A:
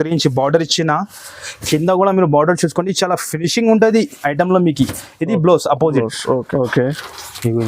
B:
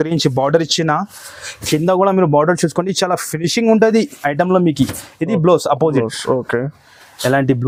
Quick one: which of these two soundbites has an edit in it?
A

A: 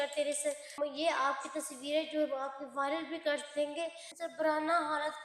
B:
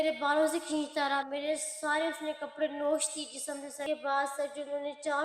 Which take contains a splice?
A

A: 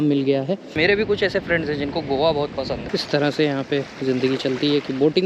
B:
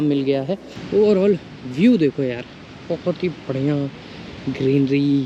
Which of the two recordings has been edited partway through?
A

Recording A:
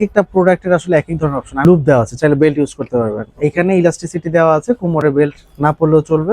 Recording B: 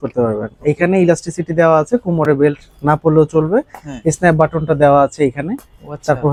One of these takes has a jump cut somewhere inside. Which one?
A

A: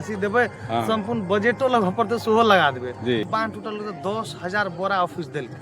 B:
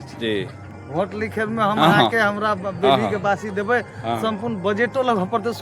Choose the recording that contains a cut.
A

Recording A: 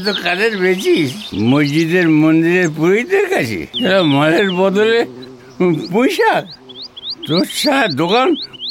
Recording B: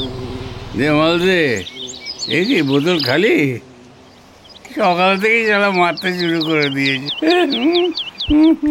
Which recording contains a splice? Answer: A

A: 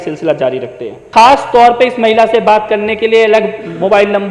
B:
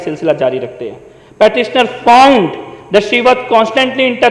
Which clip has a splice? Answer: A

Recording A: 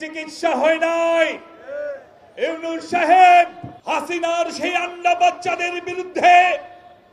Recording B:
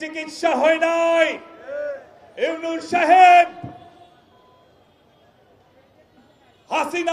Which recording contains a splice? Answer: A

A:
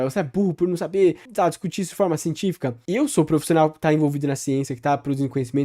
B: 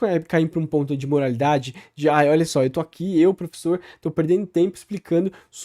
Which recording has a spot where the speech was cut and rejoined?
A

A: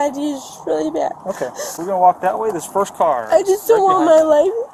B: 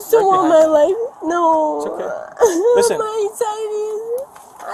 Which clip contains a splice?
A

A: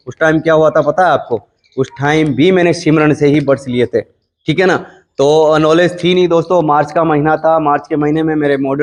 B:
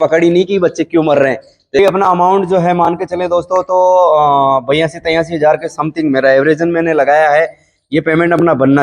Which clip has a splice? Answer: B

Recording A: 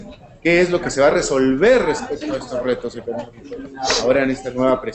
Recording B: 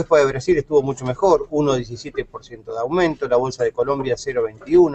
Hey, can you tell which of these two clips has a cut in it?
A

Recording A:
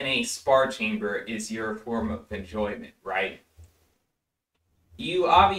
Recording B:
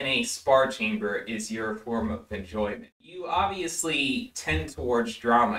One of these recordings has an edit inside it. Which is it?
B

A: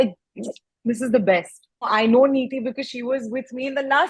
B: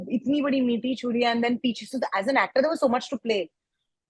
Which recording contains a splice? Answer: A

